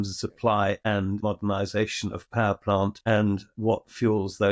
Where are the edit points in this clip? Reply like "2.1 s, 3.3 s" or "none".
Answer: 1.2 s